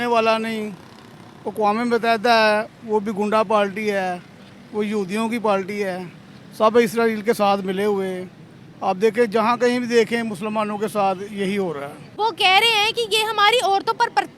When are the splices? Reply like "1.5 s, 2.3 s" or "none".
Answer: 12.0 s